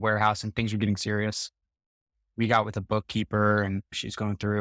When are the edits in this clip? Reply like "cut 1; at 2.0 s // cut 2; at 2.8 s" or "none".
none